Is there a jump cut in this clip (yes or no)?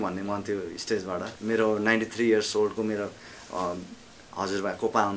yes